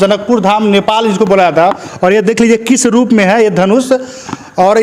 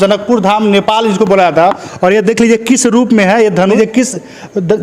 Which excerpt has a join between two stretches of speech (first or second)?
second